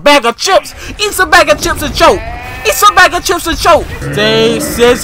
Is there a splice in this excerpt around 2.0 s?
no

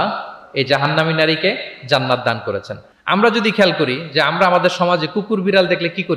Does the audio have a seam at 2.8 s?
no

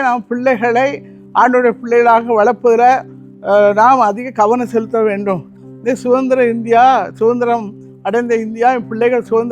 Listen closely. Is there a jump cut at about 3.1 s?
no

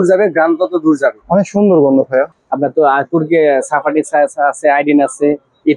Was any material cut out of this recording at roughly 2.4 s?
yes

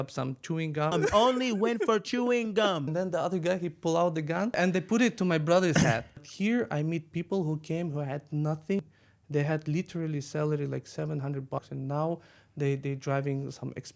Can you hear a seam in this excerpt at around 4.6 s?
yes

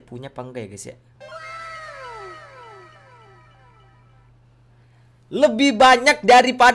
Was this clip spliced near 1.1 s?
yes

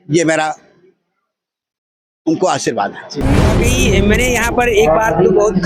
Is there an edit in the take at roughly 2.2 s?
no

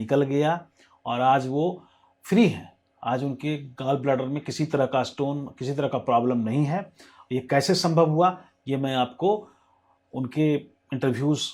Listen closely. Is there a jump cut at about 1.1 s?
no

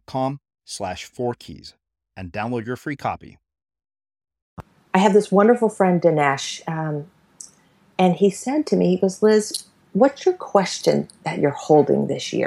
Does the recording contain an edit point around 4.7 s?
yes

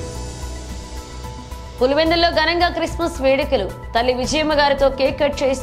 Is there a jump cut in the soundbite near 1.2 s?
yes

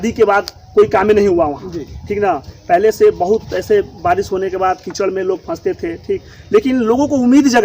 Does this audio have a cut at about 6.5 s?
no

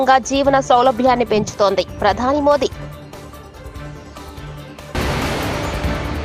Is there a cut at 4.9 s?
yes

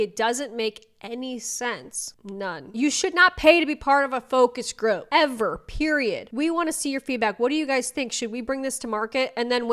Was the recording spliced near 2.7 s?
yes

